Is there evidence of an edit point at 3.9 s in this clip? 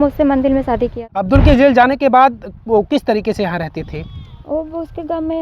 no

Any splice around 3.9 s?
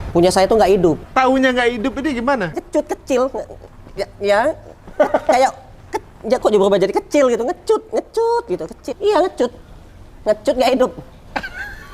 no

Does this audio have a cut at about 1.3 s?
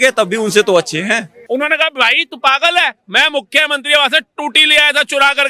yes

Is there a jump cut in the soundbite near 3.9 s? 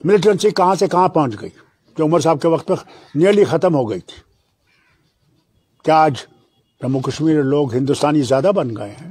no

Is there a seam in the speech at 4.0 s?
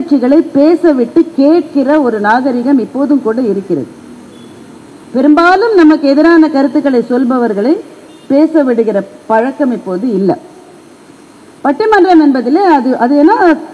no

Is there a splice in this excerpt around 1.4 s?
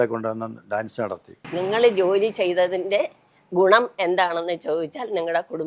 yes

